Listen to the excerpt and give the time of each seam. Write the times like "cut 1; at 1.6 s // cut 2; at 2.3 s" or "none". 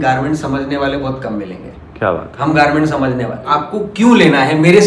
cut 1; at 3.5 s